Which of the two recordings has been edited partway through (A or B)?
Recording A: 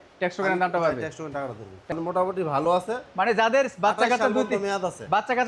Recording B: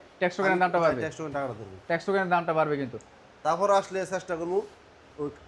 A